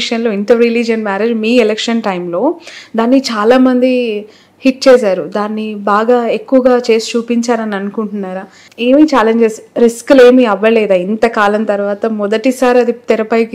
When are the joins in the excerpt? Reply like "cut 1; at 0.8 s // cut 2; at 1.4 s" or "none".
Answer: none